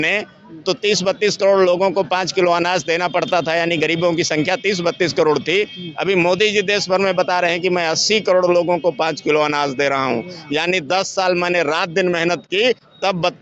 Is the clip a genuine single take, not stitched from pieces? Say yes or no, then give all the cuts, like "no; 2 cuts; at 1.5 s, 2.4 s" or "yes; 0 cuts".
yes; 0 cuts